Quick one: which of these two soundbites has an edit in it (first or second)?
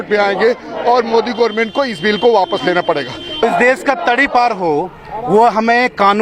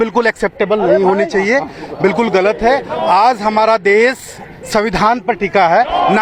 first